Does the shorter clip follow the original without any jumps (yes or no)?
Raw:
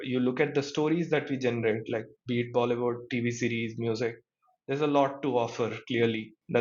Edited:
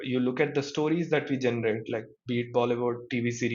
yes